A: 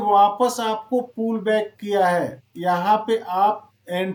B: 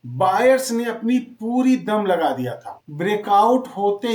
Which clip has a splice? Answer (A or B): B